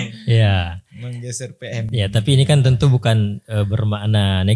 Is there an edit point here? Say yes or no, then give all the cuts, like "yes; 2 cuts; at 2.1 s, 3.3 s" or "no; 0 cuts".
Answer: no; 0 cuts